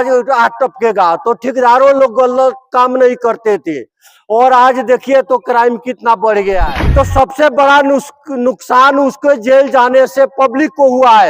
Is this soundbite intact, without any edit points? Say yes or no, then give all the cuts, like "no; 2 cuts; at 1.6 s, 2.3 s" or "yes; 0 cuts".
no; 1 cut; at 6.7 s